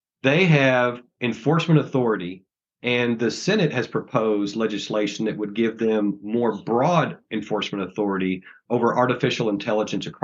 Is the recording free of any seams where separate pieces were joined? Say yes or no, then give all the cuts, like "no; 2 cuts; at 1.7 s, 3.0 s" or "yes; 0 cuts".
no; 1 cut; at 1.1 s